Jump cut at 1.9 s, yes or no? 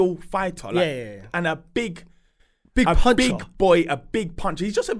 no